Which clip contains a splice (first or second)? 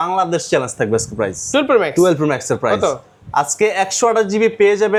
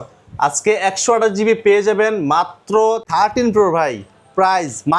second